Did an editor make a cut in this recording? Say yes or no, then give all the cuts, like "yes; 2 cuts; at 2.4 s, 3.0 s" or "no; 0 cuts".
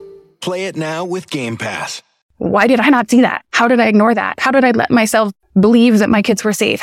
yes; 3 cuts; at 2.2 s, 3.4 s, 5.4 s